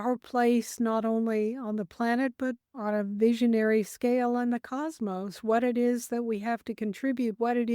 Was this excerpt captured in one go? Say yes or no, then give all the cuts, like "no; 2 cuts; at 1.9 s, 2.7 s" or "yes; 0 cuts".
no; 1 cut; at 2.7 s